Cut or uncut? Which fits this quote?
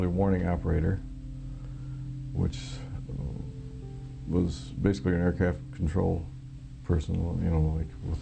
uncut